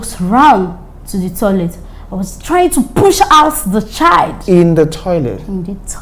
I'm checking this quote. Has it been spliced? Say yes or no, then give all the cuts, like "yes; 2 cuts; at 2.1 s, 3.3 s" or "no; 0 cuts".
no; 0 cuts